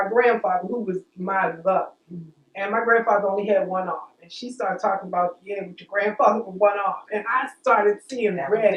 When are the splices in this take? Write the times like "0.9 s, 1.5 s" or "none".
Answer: none